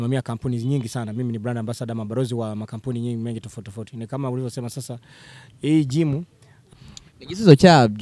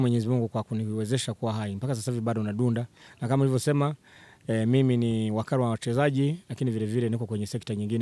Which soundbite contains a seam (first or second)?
first